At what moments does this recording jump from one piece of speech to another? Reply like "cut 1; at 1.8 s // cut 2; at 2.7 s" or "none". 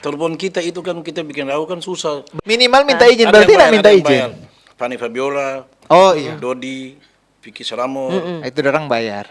cut 1; at 2.4 s